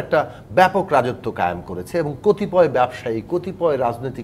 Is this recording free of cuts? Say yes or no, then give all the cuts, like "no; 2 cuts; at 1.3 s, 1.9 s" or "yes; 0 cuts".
yes; 0 cuts